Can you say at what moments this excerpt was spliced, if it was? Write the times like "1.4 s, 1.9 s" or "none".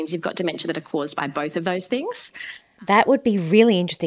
2.9 s